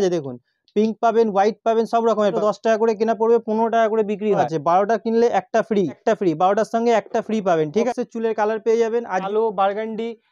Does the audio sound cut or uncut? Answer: cut